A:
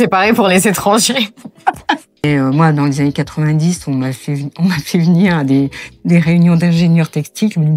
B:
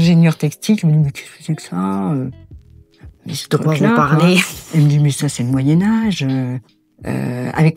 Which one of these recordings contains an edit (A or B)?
A